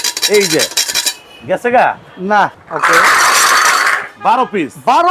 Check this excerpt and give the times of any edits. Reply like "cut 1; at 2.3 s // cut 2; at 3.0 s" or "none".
cut 1; at 2.6 s